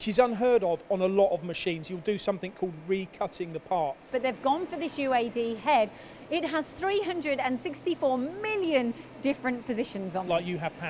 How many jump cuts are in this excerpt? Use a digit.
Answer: 2